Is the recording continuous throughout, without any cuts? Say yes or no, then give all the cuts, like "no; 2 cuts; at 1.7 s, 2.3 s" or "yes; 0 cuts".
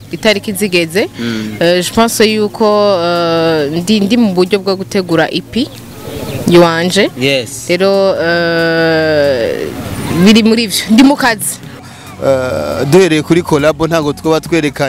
no; 1 cut; at 11.8 s